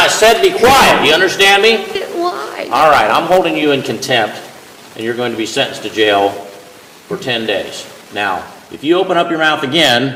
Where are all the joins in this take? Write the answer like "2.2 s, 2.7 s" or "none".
none